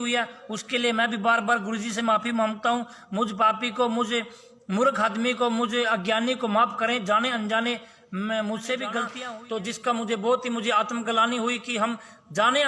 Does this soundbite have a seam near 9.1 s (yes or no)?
yes